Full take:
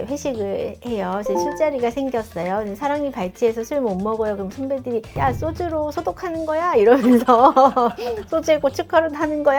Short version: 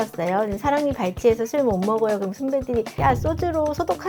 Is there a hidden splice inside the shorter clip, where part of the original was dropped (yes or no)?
no